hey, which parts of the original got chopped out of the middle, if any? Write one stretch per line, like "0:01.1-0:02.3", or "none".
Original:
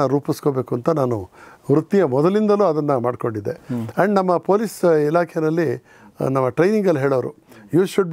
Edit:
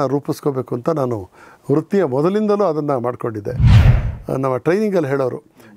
0:03.8-0:05.8